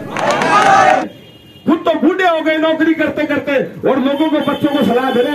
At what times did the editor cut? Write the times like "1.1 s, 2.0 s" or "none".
1.0 s

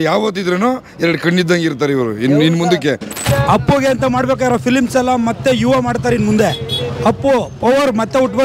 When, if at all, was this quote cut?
3.2 s

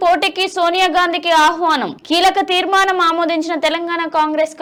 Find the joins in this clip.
none

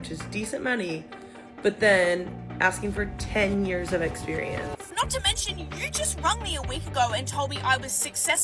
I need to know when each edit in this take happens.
4.9 s

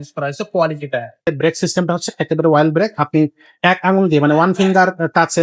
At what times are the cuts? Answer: 1.3 s

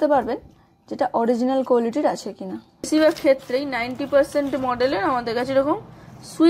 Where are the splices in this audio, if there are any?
2.9 s

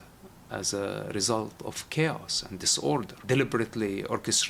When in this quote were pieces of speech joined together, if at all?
3.2 s

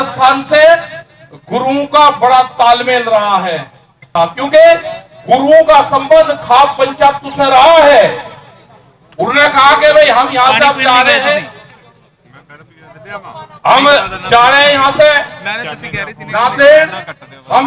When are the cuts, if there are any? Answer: 4.1 s

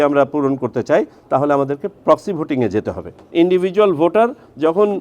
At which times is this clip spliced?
3.3 s

